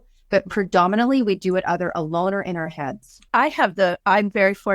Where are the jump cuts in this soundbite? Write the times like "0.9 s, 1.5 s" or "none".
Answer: 3.3 s